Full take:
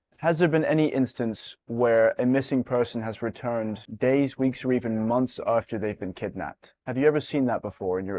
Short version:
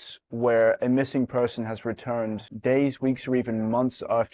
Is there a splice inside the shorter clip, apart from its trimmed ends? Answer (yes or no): no